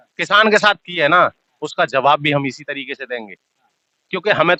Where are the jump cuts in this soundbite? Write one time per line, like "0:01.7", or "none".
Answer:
none